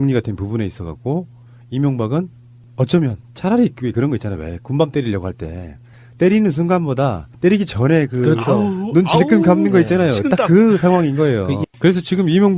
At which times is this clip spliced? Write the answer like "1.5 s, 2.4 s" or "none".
none